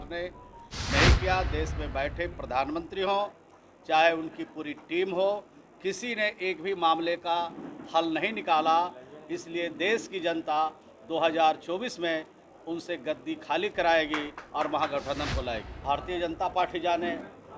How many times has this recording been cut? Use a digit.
1